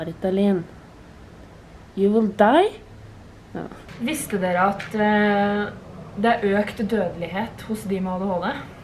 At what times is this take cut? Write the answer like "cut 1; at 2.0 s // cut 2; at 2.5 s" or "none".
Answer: cut 1; at 3.8 s

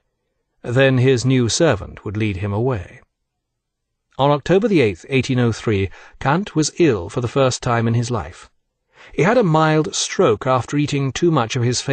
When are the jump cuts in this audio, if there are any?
none

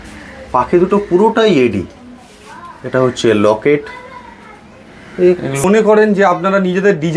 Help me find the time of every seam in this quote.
cut 1; at 5.6 s

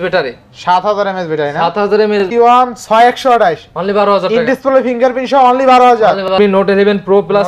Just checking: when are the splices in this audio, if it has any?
cut 1; at 2.2 s // cut 2; at 6.3 s

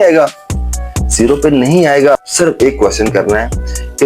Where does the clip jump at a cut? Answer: cut 1; at 2.1 s

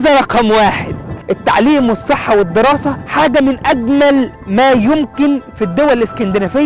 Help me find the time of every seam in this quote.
none

